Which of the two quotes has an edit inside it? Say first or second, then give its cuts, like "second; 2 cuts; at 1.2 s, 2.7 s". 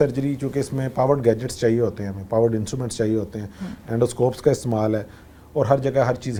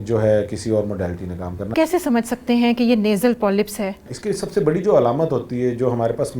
second; 2 cuts; at 1.7 s, 4.1 s